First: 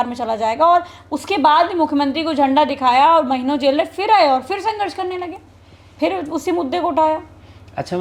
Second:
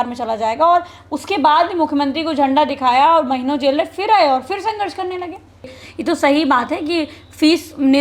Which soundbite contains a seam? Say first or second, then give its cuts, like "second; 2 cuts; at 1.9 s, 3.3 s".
second; 1 cut; at 5.8 s